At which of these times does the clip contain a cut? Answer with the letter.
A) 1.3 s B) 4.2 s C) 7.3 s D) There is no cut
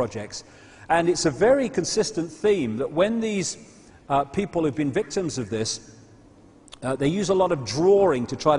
C